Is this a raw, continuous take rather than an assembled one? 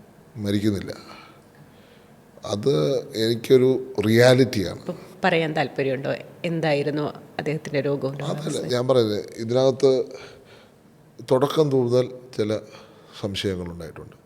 no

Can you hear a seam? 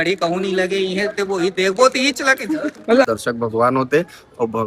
yes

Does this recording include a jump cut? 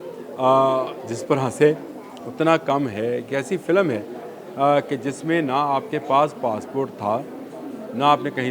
no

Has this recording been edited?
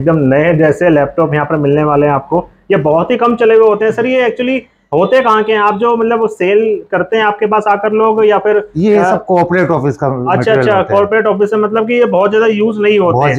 no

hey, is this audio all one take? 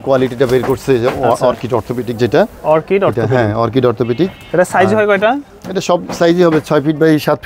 yes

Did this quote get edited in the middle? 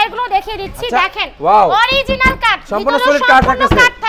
no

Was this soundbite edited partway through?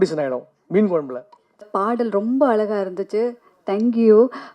yes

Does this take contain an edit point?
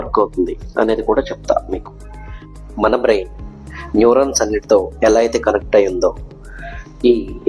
yes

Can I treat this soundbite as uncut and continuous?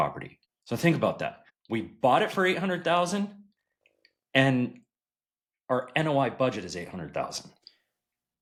yes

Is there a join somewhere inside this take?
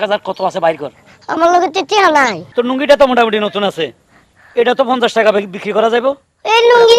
yes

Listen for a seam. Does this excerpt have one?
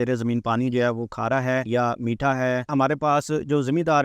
yes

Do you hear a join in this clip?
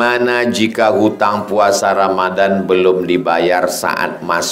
no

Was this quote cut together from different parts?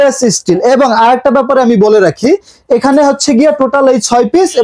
no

